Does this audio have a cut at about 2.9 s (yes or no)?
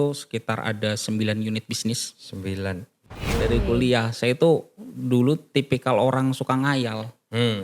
yes